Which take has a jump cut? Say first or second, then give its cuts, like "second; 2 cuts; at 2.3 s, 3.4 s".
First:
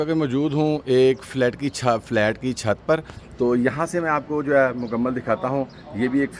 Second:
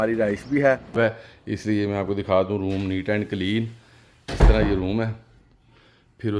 second; 1 cut; at 0.9 s